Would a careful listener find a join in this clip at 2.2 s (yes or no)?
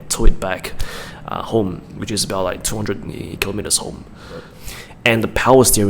no